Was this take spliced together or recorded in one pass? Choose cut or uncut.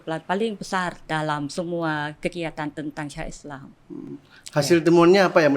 cut